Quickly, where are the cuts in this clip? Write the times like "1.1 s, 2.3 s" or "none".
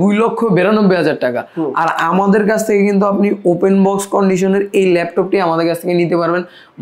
none